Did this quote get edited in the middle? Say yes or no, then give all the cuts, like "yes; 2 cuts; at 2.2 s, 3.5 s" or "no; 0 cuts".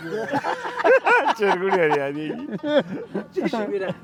no; 0 cuts